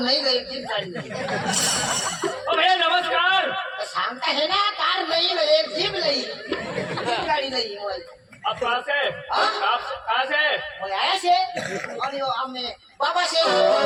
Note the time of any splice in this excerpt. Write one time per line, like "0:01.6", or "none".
none

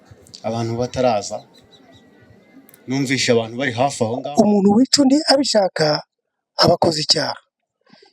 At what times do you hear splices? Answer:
0:04.1

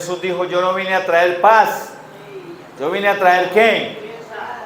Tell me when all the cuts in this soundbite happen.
none

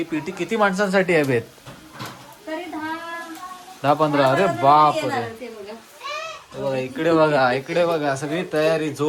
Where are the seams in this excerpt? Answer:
none

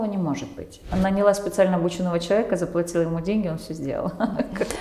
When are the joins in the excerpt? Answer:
0:00.9

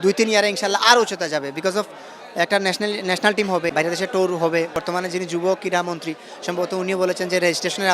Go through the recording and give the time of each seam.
0:03.7
0:04.8

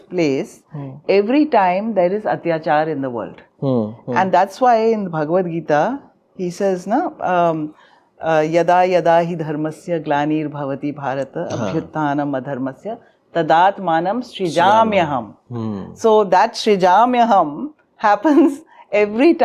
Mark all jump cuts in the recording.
none

